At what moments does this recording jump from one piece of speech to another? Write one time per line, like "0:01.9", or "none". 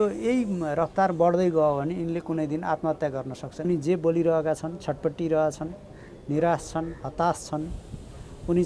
0:03.7